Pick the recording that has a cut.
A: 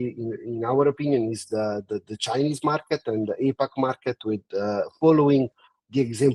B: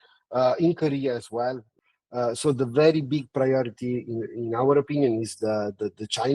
B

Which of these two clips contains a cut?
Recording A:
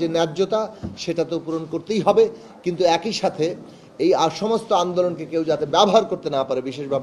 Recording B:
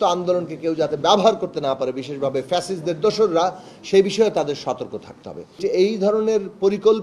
B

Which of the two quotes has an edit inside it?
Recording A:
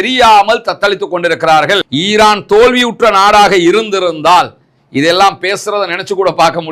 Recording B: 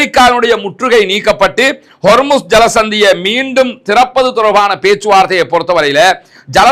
A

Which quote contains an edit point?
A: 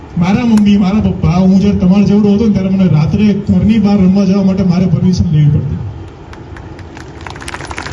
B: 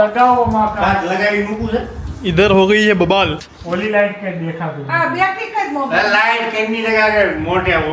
B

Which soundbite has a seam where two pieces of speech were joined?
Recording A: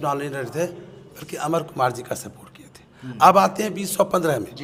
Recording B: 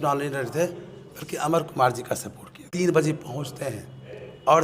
B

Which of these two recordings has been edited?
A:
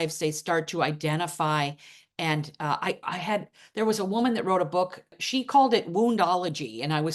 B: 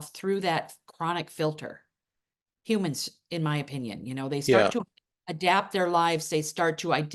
A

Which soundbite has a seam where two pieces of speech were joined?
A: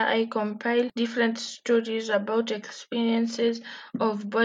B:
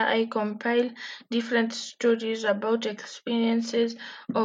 A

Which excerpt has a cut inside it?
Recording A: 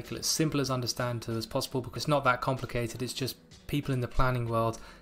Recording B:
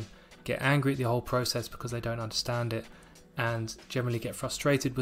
A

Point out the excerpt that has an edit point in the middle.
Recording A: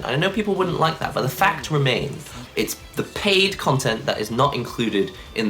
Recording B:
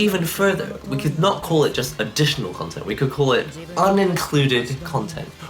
A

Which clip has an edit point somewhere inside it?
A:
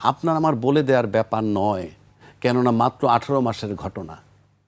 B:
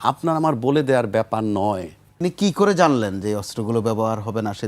B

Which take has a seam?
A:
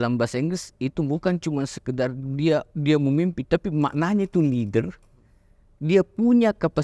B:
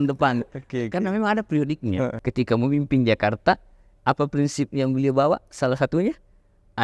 B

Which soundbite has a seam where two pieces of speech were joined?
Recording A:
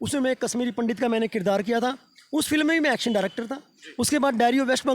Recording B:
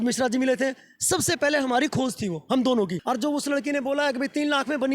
B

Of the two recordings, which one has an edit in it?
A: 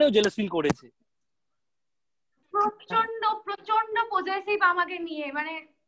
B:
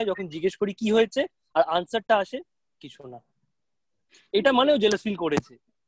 A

